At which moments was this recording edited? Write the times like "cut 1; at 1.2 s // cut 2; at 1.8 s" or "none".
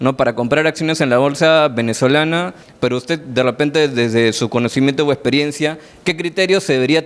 cut 1; at 2.6 s